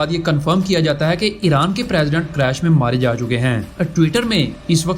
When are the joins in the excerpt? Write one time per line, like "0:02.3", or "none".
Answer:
0:03.7